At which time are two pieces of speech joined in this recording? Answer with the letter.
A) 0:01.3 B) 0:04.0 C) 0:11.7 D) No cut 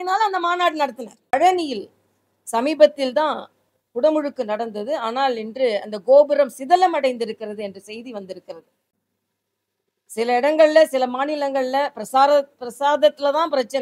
A